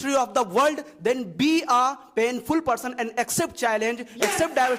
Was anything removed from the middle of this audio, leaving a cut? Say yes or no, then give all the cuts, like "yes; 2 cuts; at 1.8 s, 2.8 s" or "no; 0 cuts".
no; 0 cuts